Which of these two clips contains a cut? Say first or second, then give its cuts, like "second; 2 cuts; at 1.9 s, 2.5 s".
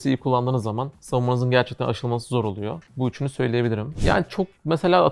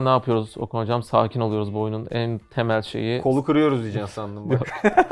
first; 3 cuts; at 0.9 s, 2.8 s, 3.9 s